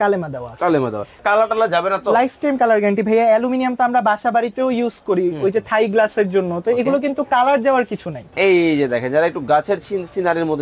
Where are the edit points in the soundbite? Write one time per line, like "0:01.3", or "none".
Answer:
0:01.2
0:08.3